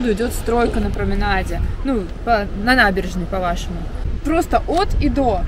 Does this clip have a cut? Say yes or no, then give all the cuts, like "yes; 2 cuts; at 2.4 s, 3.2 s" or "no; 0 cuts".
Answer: no; 0 cuts